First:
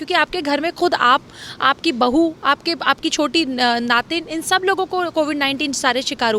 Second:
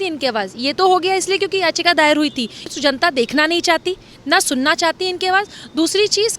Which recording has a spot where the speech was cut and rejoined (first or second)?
second